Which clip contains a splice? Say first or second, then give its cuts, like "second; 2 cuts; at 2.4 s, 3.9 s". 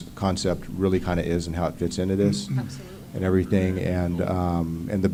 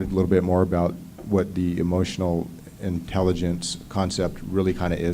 second; 1 cut; at 1.1 s